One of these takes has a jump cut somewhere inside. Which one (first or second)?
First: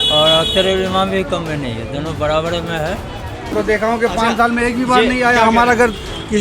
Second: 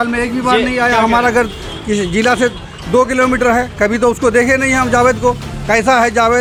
first